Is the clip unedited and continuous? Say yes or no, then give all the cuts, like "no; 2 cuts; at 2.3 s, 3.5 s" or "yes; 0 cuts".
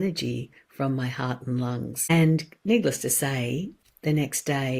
no; 1 cut; at 2.1 s